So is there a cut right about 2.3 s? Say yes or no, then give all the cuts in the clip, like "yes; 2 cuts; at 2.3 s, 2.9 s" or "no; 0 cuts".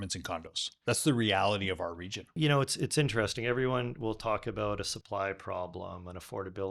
yes; 1 cut; at 2.3 s